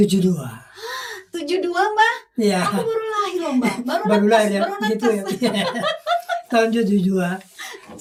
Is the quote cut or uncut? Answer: uncut